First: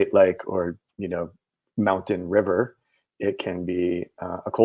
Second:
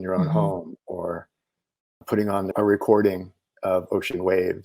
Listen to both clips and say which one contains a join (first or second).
second